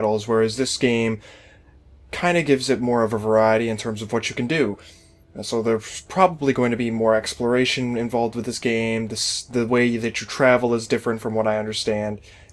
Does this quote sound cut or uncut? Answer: uncut